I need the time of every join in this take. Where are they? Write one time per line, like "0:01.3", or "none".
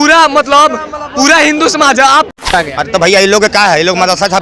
0:02.4